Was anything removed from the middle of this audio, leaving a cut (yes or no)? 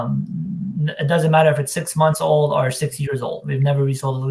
no